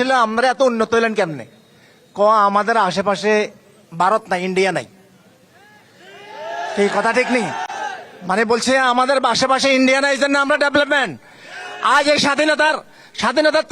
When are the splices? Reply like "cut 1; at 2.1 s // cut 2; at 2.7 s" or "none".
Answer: none